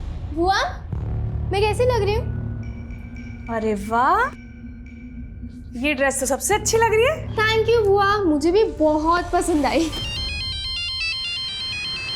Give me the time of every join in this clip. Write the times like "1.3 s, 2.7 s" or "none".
none